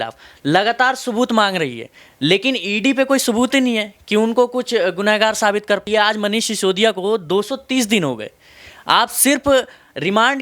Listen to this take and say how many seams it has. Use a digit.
1